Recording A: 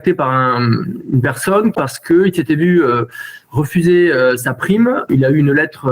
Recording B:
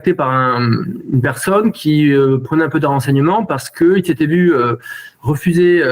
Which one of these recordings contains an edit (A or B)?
A